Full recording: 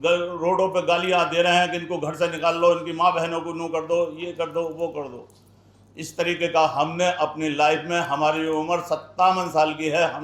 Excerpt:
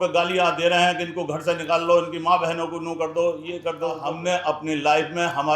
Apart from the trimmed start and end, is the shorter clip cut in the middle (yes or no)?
yes